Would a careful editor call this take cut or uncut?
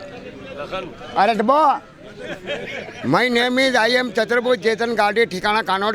uncut